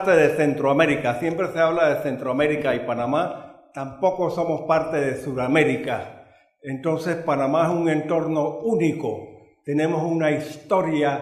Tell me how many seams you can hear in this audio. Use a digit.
1